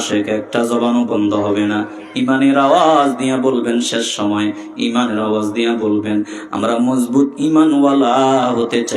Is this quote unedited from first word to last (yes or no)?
yes